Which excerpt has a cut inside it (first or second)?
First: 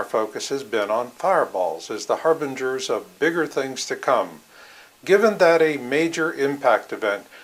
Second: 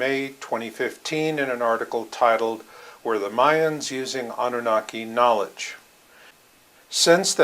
second